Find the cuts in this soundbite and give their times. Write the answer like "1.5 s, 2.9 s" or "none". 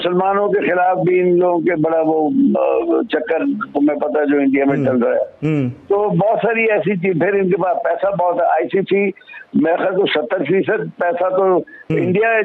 none